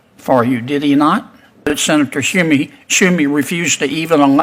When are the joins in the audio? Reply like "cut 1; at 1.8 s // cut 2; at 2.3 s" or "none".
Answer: cut 1; at 1.7 s